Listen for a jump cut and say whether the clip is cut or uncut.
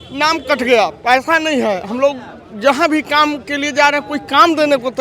uncut